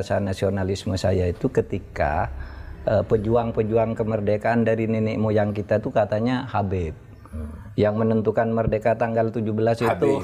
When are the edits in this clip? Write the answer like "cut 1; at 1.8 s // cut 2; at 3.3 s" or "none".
none